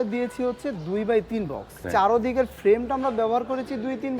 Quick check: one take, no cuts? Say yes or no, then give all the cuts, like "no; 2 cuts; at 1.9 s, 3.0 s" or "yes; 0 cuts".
no; 1 cut; at 1.9 s